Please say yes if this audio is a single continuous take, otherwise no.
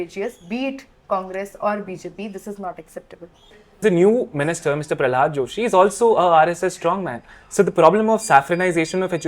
no